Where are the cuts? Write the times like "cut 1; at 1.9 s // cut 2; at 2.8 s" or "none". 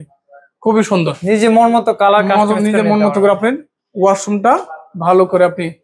none